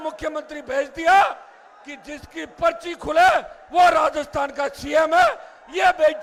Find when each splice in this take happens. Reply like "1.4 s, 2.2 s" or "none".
none